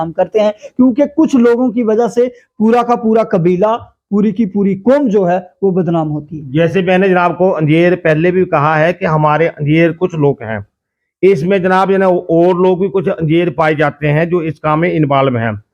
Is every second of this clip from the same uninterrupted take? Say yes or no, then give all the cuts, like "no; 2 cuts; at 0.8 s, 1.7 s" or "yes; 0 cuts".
yes; 0 cuts